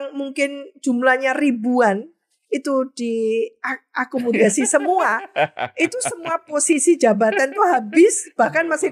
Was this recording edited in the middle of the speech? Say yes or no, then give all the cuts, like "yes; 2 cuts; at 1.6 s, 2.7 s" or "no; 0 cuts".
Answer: no; 0 cuts